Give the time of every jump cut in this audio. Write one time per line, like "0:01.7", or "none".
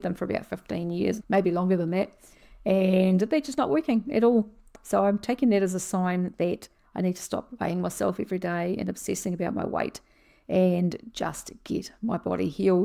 0:01.2